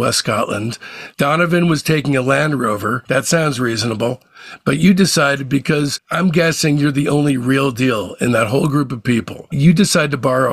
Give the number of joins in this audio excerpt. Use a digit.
1